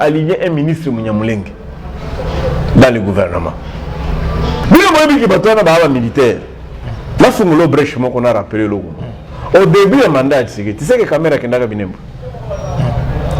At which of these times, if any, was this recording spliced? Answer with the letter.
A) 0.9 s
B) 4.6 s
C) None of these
B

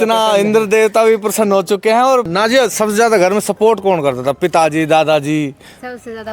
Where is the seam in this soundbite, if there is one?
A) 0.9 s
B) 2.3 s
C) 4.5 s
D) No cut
B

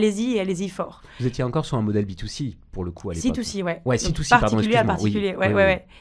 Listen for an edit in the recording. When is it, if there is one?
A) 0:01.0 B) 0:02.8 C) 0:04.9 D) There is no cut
D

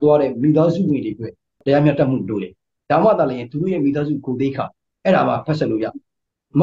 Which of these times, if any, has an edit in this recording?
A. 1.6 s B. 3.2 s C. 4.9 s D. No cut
A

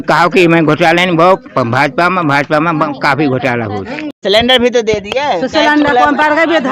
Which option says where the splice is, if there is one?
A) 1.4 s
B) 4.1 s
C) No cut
B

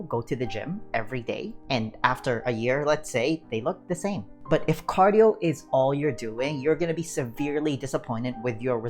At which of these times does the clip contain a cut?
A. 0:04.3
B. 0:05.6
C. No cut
A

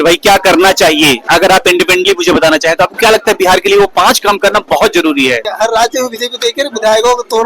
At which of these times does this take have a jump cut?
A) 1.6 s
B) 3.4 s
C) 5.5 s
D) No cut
C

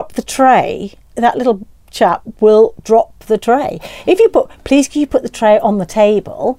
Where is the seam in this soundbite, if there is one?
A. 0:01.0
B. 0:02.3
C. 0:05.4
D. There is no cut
A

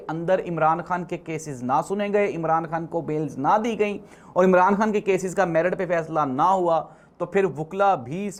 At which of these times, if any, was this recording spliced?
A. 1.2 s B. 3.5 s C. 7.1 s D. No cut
D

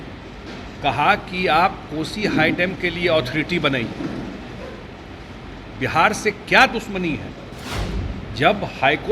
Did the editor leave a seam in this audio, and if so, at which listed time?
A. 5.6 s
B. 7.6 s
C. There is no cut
B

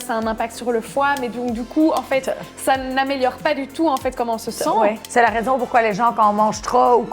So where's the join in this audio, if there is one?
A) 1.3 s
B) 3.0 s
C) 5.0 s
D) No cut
C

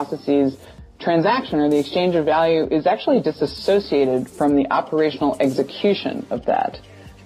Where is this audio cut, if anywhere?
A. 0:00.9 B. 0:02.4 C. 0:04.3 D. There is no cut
D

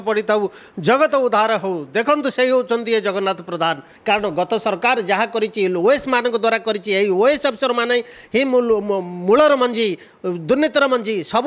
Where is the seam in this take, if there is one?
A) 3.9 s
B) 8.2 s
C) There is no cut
A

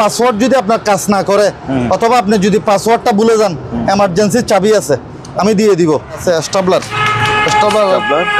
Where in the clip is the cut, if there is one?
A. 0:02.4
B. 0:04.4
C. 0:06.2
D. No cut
C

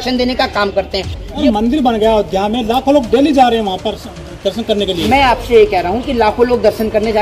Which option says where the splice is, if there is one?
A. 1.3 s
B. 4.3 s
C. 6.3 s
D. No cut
A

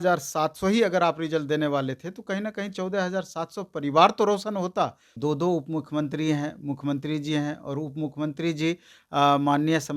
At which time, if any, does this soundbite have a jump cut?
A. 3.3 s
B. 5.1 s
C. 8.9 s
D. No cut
B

